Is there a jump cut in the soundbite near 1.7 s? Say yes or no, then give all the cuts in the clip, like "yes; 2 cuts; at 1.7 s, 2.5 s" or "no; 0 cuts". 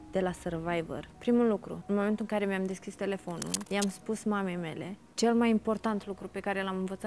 yes; 4 cuts; at 1.1 s, 1.7 s, 3.6 s, 5.1 s